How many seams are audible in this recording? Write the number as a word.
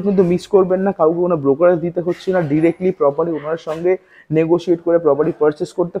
zero